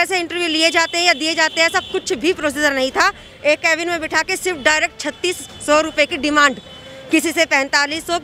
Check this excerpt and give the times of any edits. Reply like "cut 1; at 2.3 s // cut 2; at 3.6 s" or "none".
none